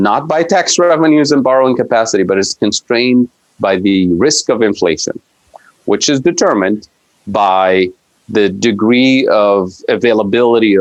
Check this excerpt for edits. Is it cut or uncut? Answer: uncut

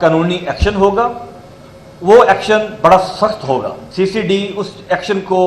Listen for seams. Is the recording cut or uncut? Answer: cut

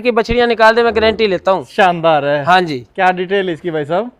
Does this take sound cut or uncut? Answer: uncut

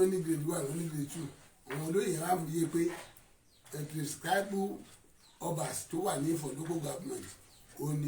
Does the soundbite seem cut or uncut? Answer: uncut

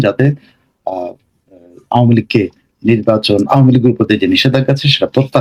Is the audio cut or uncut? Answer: uncut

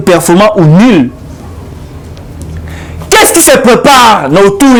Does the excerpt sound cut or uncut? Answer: uncut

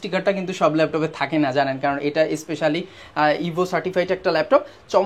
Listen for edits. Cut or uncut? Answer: uncut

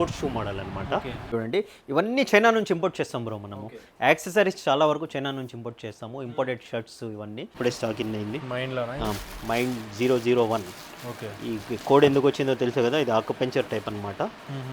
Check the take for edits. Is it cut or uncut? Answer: cut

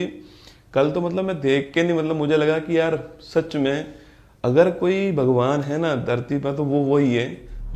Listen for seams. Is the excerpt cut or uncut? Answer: uncut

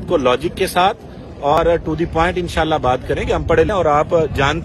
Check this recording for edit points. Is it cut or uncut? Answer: cut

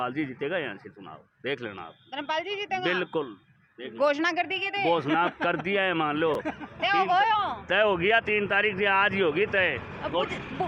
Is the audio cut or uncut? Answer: uncut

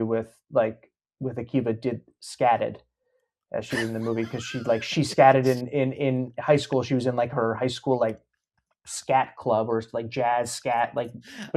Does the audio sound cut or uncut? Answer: uncut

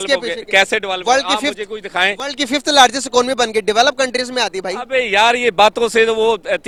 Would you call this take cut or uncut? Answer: uncut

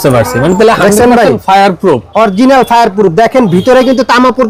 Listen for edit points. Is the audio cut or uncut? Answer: uncut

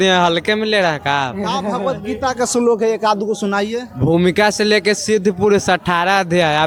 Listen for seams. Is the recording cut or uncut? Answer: uncut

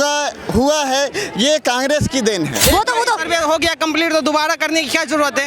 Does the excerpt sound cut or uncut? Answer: cut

